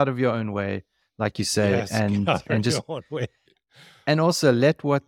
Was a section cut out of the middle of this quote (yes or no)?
no